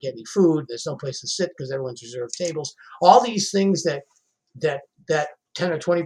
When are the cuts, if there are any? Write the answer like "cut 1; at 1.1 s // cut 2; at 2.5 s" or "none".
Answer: none